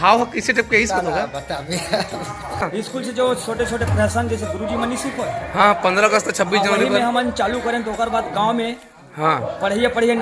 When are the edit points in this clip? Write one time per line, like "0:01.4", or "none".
0:02.6